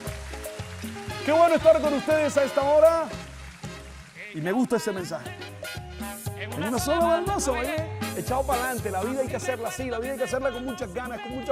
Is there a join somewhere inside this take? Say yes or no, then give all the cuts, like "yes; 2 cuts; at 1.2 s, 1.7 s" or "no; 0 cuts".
no; 0 cuts